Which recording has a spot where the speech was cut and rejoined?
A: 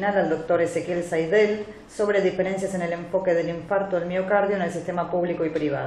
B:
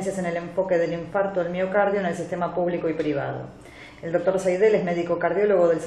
A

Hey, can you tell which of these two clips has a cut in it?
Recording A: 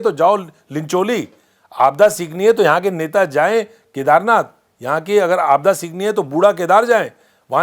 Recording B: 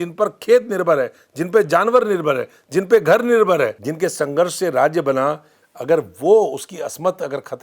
B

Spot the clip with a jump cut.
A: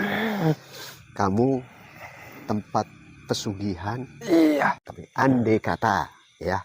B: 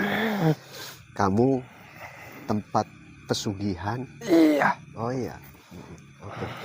A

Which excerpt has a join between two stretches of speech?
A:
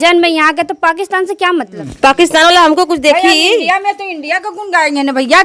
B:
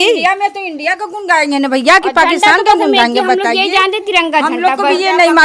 A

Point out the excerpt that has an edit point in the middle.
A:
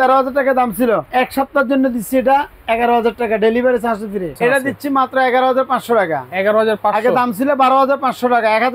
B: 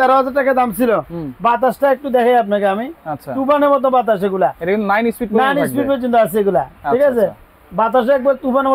A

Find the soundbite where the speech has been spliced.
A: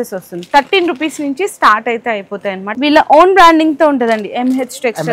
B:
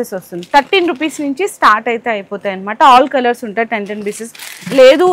A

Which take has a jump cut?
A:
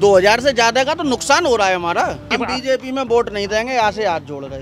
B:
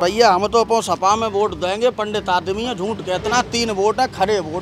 A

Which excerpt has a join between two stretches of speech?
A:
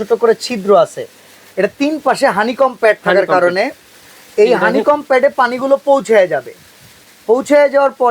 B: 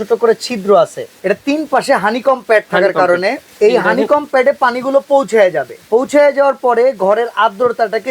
B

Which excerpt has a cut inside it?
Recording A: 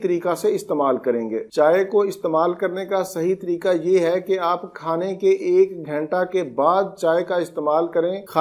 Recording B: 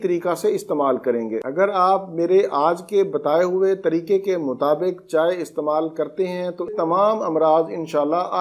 B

